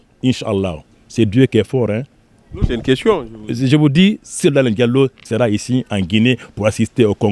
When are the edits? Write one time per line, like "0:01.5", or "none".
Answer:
none